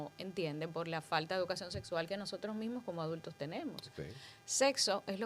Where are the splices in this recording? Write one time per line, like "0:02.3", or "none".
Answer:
none